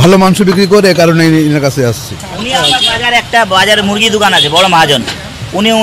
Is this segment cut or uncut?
uncut